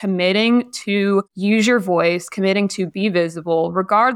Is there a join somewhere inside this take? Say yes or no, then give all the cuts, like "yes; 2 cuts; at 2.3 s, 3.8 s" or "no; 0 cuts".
yes; 1 cut; at 1.3 s